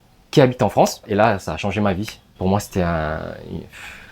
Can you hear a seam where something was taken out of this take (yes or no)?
yes